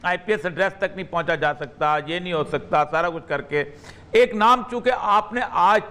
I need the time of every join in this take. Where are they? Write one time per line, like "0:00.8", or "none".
none

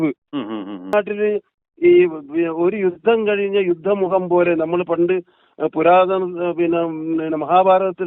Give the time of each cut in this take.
0:00.9

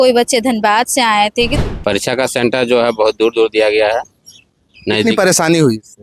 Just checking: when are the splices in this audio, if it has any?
0:01.5

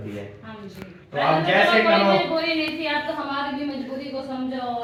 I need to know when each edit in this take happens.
none

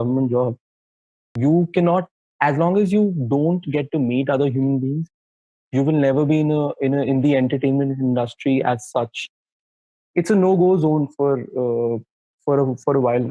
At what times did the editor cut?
0:01.3
0:09.6

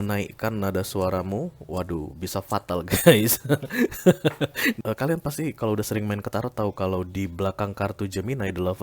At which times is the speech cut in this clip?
0:04.8

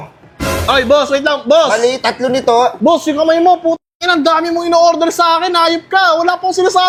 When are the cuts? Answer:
none

